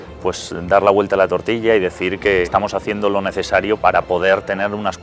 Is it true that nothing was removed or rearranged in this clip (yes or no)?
no